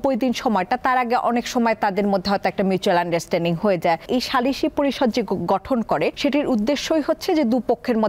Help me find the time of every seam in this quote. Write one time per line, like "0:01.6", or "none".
0:04.0
0:06.2